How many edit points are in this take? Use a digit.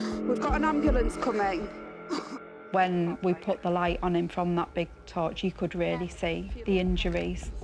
0